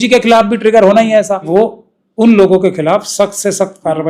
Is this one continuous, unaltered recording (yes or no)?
no